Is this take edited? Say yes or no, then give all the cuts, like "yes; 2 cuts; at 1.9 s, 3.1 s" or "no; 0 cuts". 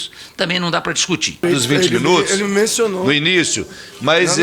yes; 1 cut; at 1.4 s